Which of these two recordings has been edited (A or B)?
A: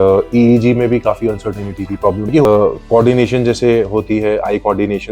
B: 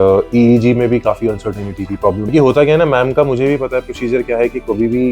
A